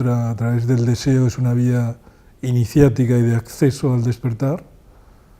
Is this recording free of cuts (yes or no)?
yes